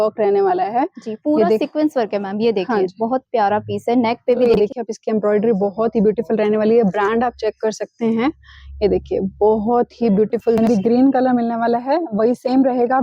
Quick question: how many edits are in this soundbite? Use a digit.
2